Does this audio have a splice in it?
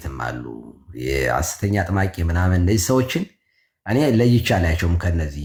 no; 0 cuts

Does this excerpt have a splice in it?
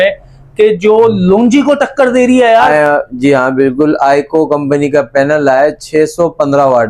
no; 0 cuts

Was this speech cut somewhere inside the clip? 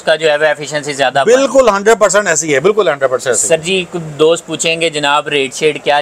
no; 0 cuts

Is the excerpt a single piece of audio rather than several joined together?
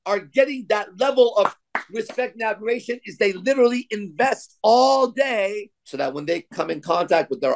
no; 1 cut; at 5.8 s

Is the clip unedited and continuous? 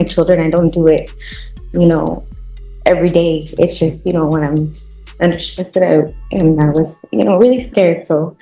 yes; 0 cuts

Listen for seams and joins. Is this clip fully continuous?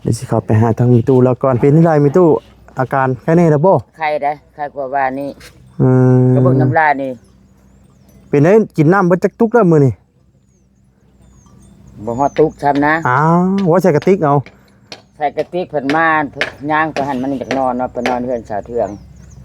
no; 1 cut; at 1.6 s

